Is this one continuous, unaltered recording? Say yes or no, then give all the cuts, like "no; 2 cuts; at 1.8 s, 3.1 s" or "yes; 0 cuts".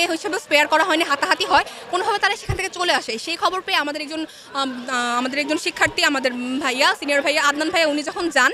yes; 0 cuts